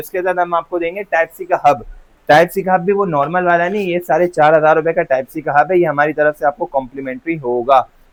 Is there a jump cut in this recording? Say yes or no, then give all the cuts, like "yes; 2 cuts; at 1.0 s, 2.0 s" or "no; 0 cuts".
no; 0 cuts